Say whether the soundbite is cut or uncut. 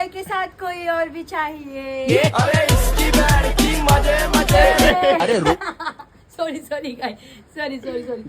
uncut